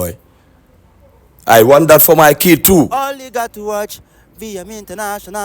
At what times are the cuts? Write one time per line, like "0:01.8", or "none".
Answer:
none